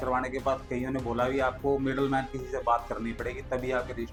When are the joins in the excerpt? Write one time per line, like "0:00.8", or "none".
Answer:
none